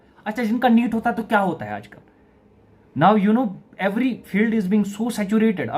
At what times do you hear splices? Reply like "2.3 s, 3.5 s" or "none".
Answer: none